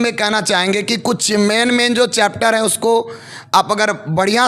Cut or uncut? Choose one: uncut